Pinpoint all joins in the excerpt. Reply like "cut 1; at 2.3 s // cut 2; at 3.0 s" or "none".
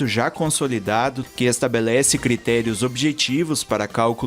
cut 1; at 1.2 s